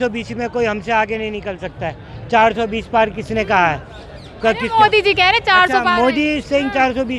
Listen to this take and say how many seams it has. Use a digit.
0